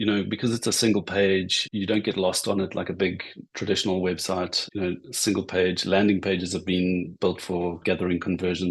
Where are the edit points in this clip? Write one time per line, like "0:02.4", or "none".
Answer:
0:01.6
0:04.6